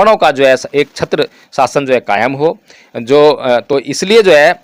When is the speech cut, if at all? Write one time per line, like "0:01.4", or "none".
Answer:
none